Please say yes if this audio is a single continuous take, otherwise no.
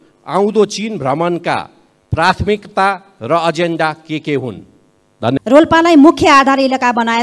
no